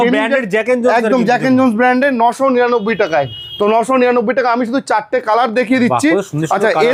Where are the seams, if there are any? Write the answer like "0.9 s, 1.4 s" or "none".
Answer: none